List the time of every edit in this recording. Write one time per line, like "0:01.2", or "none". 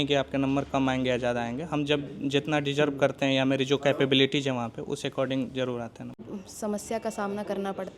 0:06.2